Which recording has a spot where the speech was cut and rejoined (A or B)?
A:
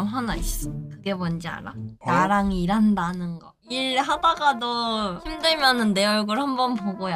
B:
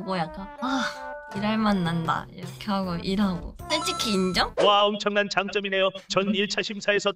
B